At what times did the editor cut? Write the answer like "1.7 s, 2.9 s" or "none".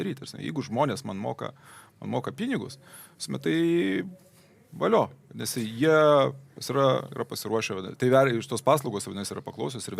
none